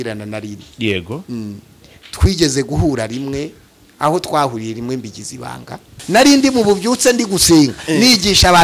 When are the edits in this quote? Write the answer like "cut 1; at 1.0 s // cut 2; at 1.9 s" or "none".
cut 1; at 6.0 s

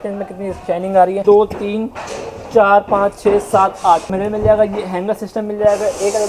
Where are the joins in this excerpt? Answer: cut 1; at 1.2 s // cut 2; at 4.1 s

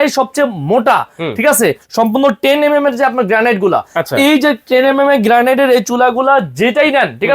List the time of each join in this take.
none

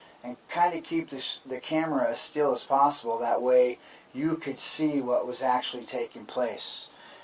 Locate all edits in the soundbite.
cut 1; at 5.6 s

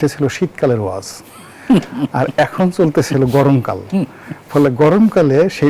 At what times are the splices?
none

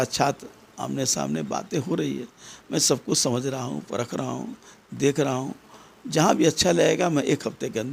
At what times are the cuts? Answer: none

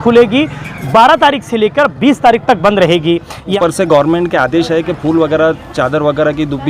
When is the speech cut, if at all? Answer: cut 1; at 3.5 s

